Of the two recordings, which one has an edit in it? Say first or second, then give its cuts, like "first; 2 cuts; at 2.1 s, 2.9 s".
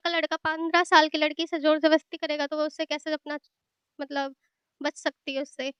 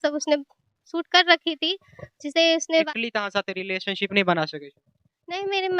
second; 1 cut; at 2.8 s